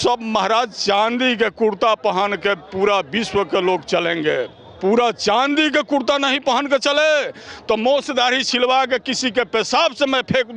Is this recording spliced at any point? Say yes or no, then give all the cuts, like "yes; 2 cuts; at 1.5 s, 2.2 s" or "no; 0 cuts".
no; 0 cuts